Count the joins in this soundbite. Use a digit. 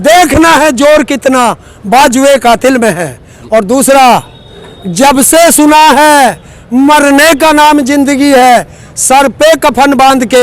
0